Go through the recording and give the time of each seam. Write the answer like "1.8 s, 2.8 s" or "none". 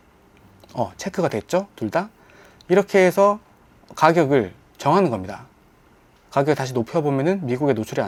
none